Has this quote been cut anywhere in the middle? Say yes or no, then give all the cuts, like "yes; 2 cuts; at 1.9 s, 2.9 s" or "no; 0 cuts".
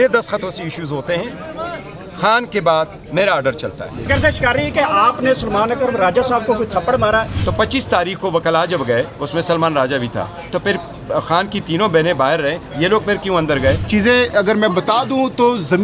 yes; 3 cuts; at 4.0 s, 7.4 s, 13.8 s